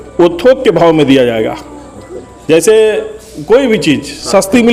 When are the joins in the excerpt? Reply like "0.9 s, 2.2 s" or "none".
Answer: none